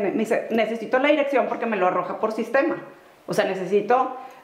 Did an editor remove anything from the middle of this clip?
no; 0 cuts

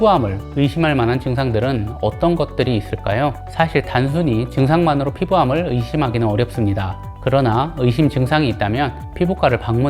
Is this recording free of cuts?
yes; 0 cuts

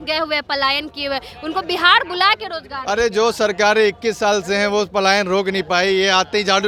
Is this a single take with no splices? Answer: yes; 0 cuts

